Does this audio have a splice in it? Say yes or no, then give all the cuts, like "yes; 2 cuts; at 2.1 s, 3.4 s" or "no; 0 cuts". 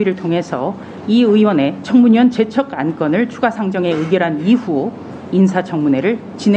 no; 0 cuts